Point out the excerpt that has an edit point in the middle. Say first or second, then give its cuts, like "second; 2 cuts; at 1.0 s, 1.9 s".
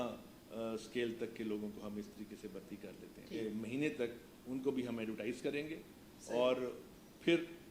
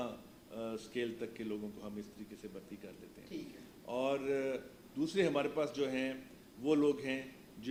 first; 1 cut; at 3.4 s